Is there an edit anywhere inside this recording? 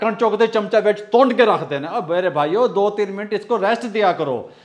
no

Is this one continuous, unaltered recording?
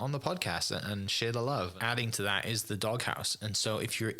no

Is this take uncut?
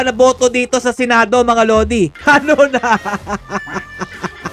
no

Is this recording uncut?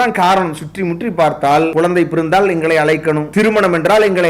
no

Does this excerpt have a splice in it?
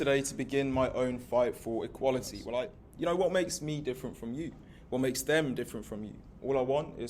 yes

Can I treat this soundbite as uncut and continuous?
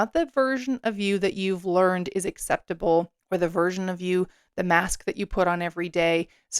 no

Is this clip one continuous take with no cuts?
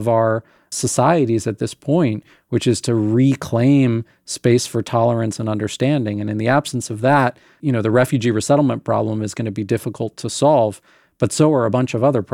yes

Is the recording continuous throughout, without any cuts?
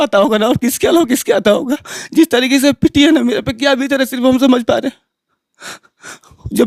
yes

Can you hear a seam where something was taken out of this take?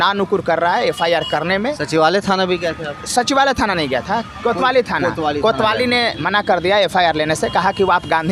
no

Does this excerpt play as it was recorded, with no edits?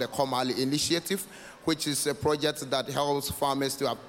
yes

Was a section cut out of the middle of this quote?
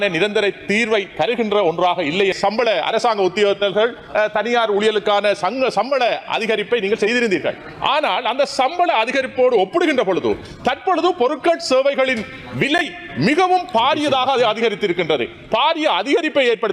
yes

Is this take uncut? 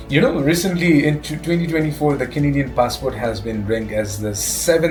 yes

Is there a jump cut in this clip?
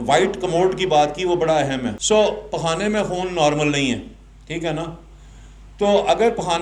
yes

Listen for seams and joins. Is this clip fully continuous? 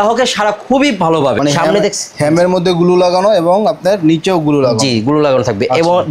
no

